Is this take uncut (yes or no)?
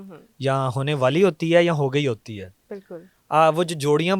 yes